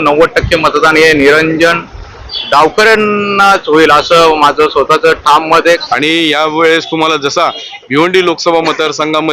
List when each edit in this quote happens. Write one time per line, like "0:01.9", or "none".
0:05.8